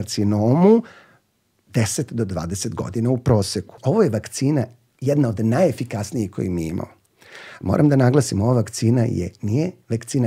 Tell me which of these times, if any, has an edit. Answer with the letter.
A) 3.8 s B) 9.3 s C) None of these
A